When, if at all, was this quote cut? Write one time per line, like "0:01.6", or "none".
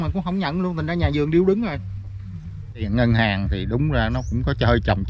0:02.9